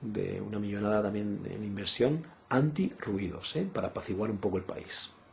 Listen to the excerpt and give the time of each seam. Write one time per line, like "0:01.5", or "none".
none